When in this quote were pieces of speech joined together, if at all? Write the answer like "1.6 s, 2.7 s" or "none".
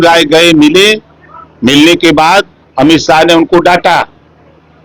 none